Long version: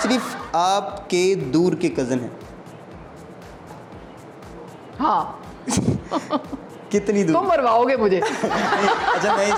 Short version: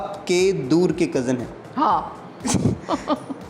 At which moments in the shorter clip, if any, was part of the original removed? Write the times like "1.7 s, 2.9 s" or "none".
1.6 s